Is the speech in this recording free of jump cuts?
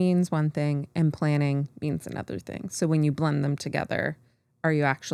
yes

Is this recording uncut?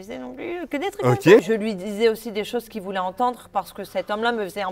no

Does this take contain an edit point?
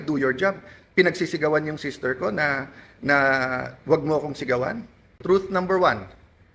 yes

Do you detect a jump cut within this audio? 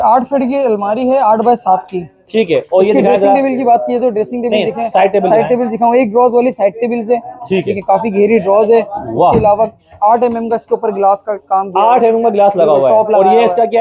no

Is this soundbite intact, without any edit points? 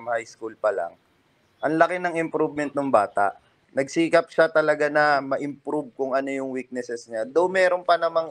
no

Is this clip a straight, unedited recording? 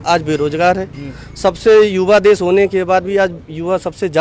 yes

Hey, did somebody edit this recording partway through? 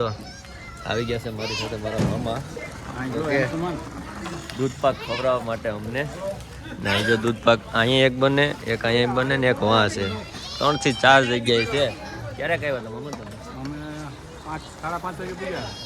no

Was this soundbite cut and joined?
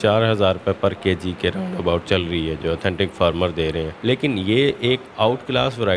yes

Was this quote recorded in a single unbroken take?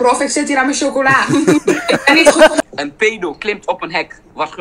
no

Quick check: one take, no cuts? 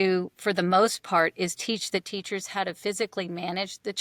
yes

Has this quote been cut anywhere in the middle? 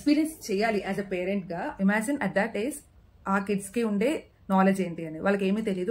yes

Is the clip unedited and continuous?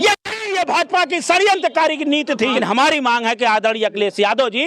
no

